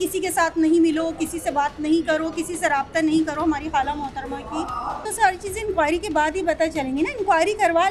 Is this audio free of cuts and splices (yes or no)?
no